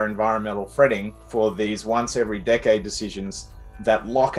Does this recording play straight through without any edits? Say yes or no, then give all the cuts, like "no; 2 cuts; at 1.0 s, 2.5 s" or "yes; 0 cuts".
no; 1 cut; at 1.2 s